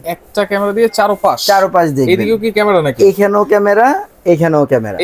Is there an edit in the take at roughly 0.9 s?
no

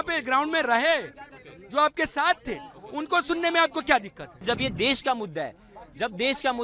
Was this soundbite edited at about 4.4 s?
yes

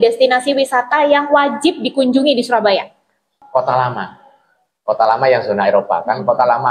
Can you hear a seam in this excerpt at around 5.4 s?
no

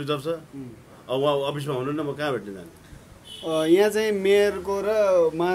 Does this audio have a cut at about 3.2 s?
no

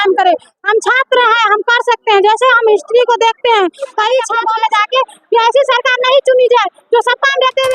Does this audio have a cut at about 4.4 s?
yes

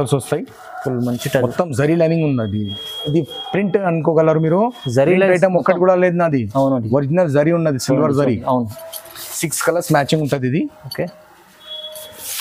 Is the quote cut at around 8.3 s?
no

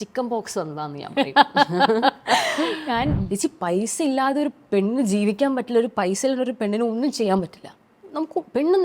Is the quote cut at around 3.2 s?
yes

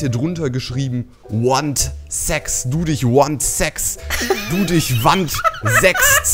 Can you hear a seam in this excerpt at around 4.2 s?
no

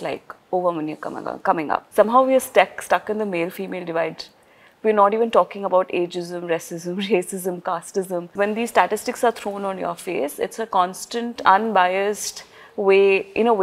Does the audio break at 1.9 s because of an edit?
yes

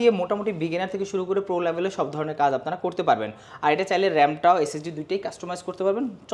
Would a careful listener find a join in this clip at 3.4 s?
no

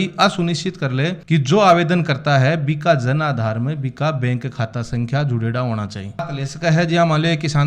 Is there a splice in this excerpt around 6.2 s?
yes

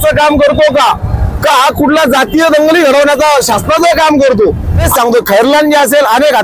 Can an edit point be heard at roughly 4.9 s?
yes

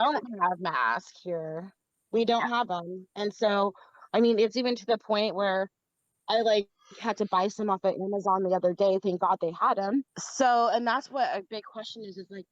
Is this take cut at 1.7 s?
no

